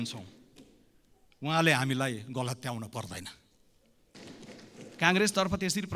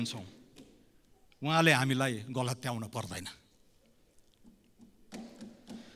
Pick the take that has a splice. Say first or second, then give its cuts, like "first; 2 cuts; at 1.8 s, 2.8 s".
first; 1 cut; at 4.2 s